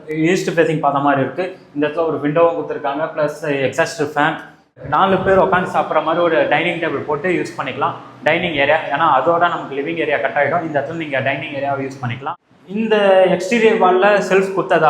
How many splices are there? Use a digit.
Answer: 2